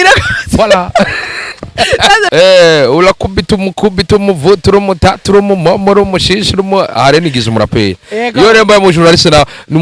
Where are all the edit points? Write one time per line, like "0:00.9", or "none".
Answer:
0:02.3